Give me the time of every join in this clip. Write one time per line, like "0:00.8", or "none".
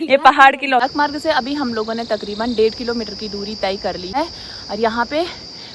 0:00.8
0:04.1

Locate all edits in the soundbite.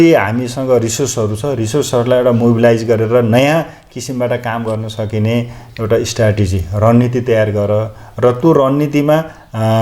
0:05.7

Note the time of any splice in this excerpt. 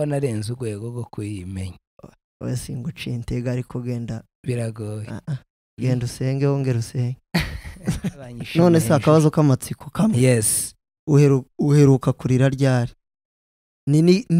0:08.4

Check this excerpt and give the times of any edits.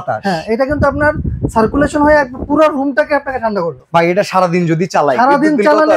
0:03.8

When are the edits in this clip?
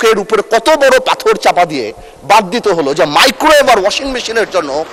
none

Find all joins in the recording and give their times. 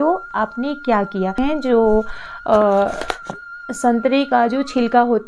0:01.4

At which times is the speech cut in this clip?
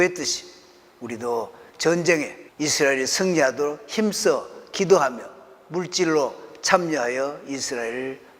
0:02.4

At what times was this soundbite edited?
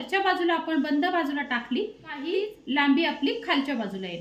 0:02.2

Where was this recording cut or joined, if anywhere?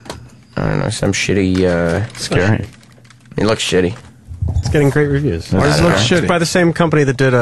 none

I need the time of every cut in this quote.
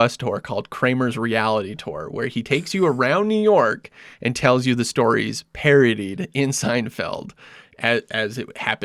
none

